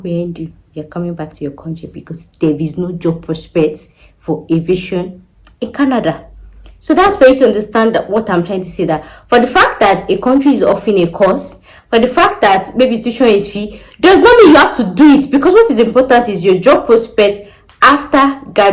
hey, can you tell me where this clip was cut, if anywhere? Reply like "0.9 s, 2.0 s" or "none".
none